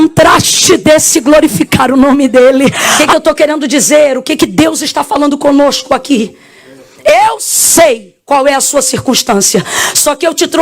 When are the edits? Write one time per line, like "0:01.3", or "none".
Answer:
0:02.9

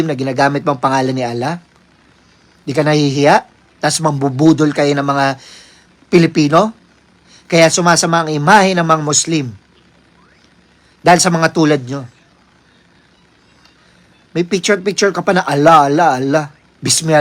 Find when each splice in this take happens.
none

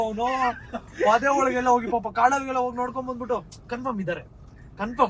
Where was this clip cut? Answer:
none

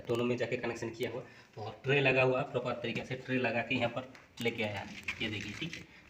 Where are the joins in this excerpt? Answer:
none

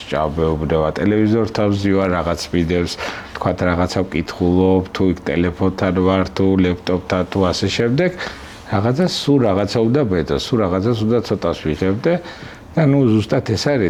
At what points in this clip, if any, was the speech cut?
none

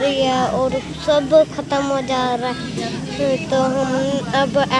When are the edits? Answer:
none

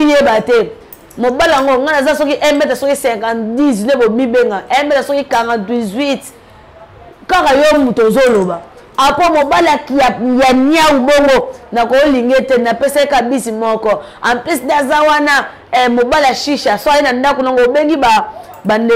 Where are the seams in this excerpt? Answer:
none

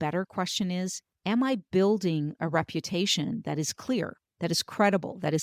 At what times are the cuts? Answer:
0:01.1

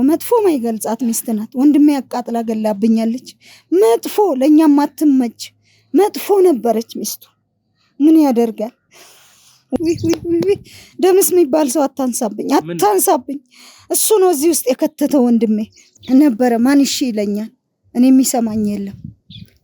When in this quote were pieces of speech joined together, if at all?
0:09.8
0:15.8

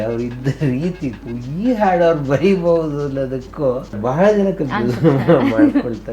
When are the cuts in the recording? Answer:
0:04.0

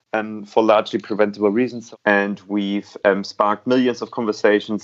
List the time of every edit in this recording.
0:01.8

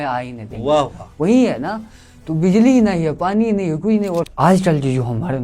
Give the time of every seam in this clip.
0:04.3

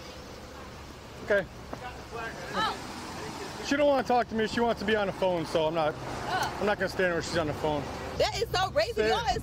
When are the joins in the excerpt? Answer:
0:08.0

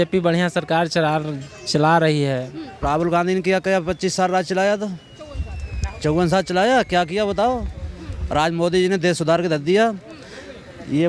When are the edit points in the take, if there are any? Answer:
0:02.7

